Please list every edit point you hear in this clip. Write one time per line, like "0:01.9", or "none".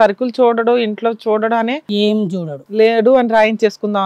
none

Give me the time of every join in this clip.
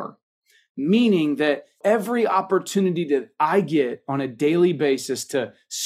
0:01.8

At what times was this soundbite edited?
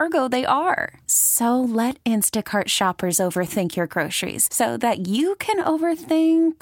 none

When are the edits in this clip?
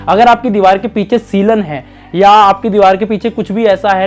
none

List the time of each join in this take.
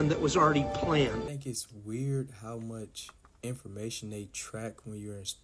0:01.3

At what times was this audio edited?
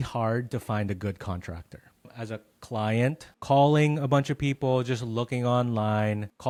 none

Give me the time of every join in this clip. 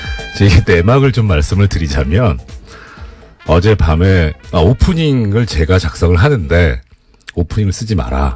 0:04.6

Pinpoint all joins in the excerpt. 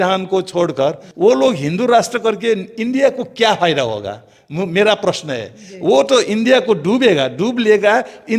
none

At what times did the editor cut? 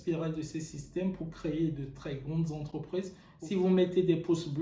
0:03.2

